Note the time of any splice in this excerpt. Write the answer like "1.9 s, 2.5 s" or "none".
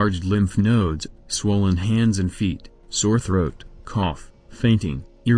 3.9 s